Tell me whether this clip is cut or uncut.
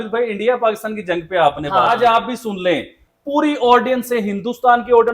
cut